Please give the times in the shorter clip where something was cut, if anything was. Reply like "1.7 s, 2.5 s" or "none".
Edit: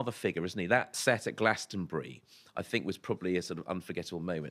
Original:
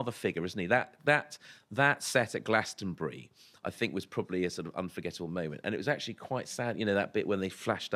0.9 s